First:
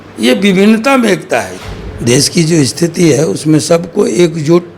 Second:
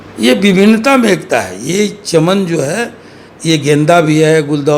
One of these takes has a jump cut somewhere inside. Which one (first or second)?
first